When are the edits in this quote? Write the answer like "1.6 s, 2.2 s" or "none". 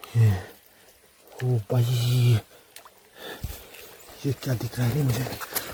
none